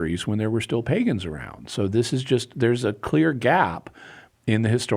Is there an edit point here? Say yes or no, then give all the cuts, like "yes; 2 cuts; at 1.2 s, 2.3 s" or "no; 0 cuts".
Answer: no; 0 cuts